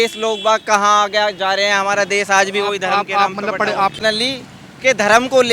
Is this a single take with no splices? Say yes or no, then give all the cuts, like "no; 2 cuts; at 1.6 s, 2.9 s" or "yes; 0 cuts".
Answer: no; 1 cut; at 4.0 s